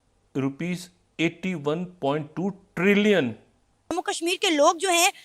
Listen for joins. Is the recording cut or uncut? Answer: cut